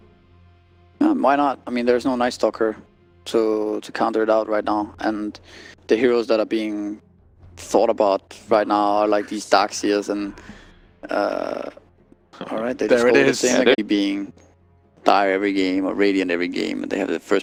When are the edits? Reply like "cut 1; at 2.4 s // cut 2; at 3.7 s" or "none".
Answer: none